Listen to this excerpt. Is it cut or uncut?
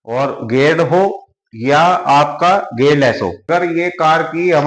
cut